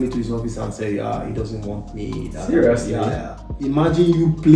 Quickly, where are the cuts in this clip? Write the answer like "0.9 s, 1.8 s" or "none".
3.6 s